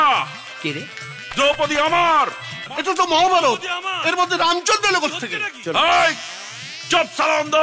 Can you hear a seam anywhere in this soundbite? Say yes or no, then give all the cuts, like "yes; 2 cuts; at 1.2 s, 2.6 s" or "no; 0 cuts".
yes; 1 cut; at 2.7 s